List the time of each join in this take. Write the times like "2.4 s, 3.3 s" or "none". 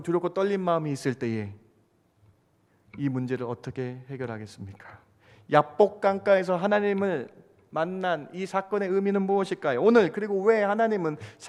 none